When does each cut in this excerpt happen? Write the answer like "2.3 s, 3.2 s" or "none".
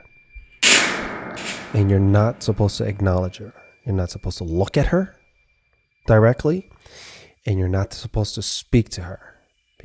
none